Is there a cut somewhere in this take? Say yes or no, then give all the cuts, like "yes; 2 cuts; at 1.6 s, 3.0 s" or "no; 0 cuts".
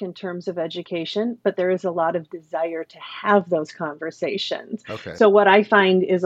no; 0 cuts